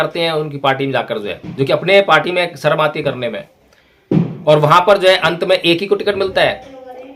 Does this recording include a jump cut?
no; 0 cuts

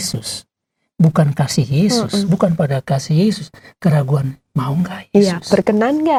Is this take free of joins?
yes; 0 cuts

